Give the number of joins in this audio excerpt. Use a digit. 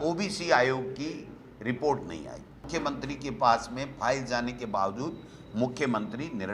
1